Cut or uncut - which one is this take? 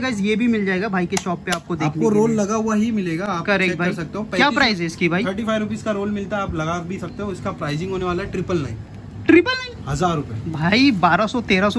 uncut